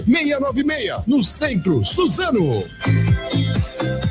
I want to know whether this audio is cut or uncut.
cut